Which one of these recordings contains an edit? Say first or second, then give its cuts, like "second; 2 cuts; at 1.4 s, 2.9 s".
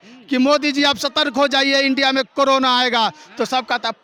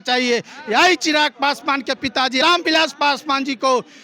second; 1 cut; at 2.4 s